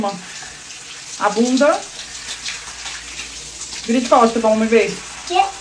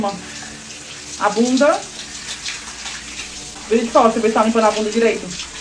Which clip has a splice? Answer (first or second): second